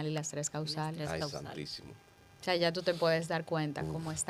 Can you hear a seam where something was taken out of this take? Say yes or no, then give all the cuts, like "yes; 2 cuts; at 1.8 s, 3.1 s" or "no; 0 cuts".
no; 0 cuts